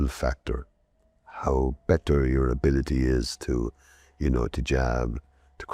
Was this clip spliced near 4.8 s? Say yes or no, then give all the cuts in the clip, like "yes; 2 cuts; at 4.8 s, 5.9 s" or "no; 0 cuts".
no; 0 cuts